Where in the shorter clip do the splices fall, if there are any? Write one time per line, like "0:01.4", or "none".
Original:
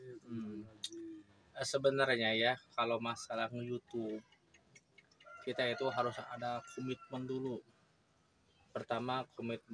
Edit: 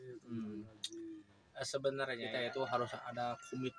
0:02.2